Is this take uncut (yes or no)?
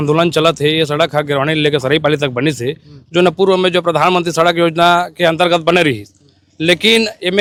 yes